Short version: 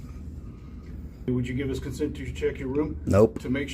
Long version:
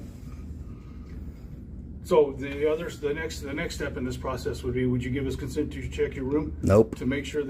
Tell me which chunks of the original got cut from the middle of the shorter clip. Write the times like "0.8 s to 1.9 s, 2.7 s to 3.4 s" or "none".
1.5 s to 4.8 s

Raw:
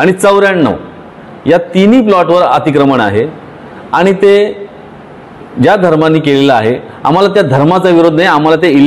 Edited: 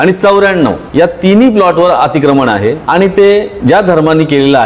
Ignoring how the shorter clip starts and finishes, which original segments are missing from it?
0.8 s to 1.3 s, 3.3 s to 3.9 s, 4.6 s to 5.5 s

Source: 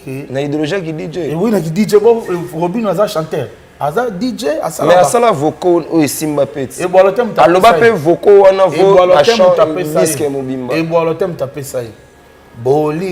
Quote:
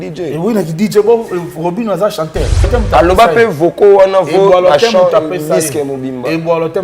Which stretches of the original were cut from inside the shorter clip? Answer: 3.6 s to 7.1 s

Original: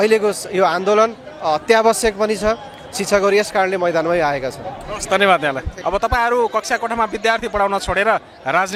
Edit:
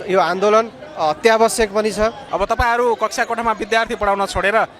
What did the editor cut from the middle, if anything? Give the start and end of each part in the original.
2.7 s to 5.8 s

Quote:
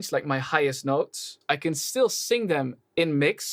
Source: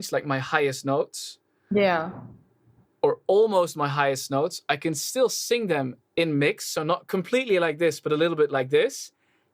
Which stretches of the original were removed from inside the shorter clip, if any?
1.4 s to 4.6 s

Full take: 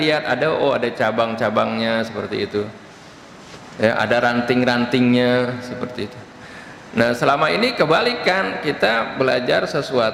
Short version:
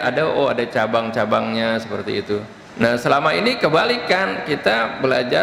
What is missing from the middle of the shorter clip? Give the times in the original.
2.8 s to 6.8 s

